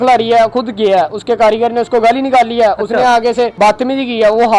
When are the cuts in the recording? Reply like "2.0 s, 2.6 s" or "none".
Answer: 3.5 s